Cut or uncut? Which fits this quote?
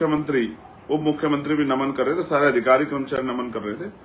uncut